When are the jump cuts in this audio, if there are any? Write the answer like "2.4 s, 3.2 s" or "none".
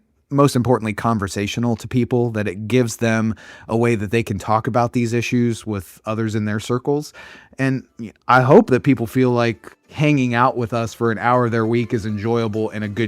9.9 s